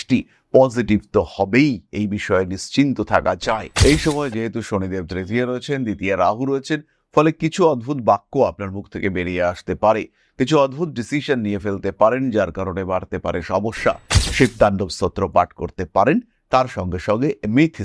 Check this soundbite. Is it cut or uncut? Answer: cut